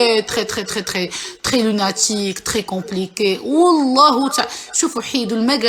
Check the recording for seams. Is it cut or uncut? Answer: uncut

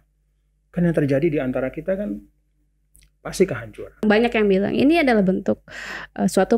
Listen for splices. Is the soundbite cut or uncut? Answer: cut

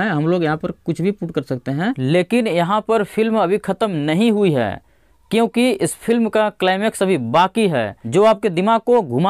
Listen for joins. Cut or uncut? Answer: cut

